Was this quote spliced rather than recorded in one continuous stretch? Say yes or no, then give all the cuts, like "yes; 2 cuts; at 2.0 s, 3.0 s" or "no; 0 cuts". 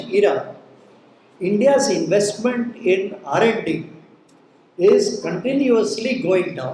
no; 0 cuts